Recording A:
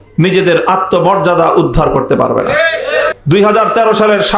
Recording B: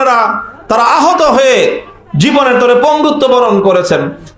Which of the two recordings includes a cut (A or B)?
A